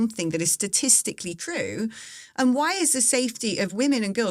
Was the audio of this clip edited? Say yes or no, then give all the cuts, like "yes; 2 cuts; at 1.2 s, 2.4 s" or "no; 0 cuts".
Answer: no; 0 cuts